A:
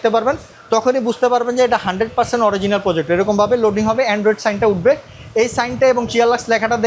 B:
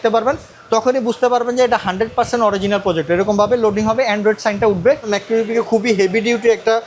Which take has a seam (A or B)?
B